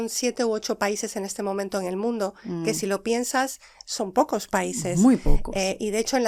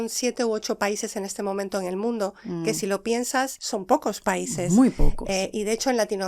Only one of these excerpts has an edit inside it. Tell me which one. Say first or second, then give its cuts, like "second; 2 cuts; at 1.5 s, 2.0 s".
second; 1 cut; at 3.6 s